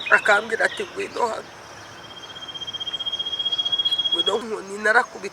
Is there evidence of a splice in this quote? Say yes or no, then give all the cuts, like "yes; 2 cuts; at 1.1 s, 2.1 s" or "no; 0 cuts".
yes; 1 cut; at 4.4 s